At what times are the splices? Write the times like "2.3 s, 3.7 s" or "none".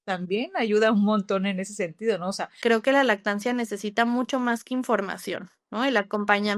2.3 s